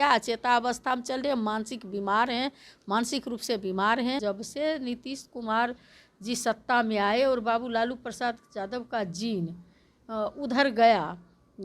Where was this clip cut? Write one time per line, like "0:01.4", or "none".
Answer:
0:04.2